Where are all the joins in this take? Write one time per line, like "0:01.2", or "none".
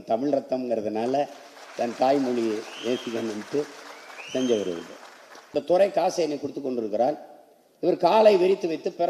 0:05.5